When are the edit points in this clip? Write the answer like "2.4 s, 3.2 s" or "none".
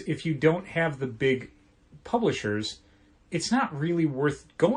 none